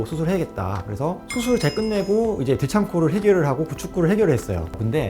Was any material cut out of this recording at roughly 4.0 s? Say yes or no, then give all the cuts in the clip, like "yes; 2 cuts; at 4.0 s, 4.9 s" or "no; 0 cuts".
no; 0 cuts